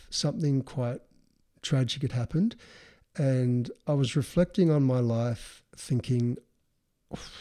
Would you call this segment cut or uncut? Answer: uncut